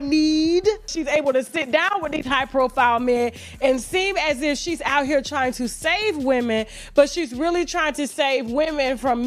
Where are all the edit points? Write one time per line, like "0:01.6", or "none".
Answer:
0:01.0